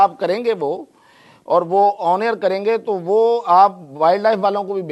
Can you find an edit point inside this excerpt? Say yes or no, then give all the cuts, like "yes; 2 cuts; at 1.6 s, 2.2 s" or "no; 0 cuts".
no; 0 cuts